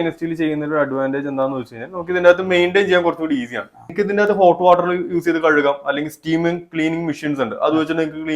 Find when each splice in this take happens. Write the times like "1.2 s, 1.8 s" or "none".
3.9 s